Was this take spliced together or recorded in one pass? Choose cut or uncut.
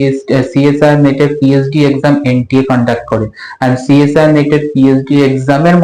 uncut